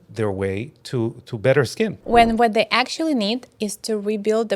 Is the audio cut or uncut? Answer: cut